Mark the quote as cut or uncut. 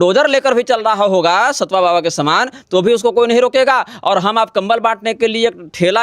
uncut